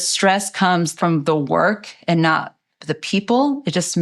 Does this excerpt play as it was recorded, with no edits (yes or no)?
no